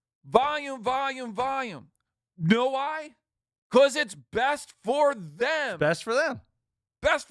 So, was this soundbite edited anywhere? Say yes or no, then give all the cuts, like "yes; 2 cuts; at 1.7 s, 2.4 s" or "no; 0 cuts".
no; 0 cuts